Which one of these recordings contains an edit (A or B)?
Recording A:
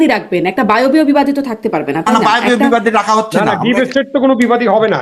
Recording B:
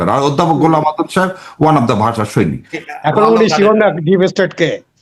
B